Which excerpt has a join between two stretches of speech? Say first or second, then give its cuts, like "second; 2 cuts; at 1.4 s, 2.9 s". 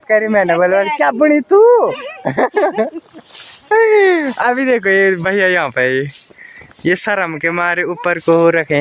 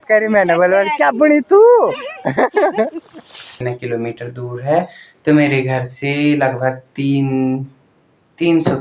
second; 1 cut; at 3.5 s